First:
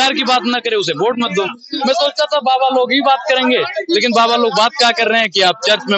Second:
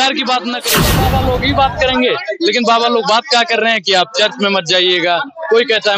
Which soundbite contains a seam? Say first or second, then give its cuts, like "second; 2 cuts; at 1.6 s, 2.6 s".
second; 1 cut; at 0.9 s